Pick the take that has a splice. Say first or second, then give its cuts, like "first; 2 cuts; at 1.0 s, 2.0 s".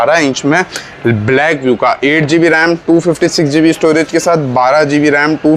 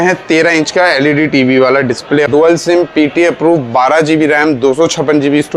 second; 1 cut; at 2.3 s